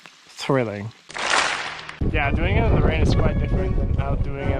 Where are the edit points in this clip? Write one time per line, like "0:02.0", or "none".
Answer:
0:01.9